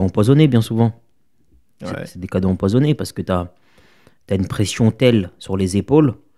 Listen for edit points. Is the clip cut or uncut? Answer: uncut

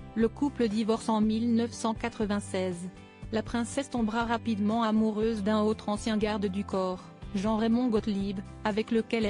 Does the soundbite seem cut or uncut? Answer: cut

